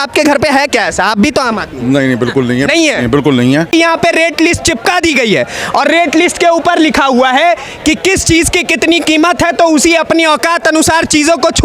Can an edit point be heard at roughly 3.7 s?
yes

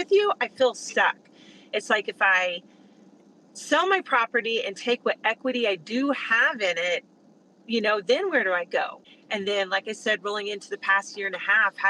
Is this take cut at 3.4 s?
no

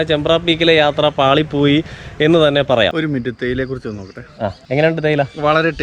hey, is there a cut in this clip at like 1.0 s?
no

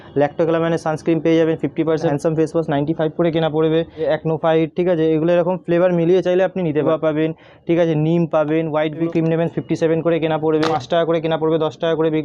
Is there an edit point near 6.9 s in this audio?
yes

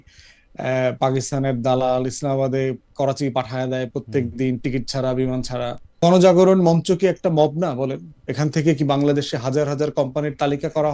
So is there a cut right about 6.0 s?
yes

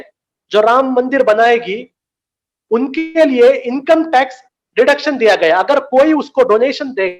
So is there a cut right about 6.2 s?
no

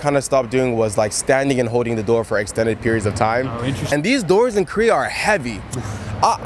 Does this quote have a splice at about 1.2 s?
no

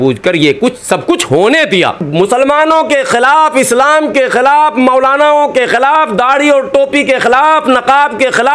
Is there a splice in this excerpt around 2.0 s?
yes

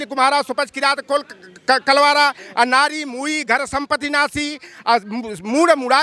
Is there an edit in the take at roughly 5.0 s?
no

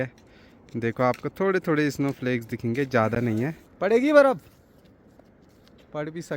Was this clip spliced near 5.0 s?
no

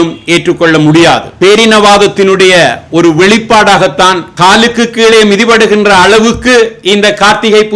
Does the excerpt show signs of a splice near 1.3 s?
yes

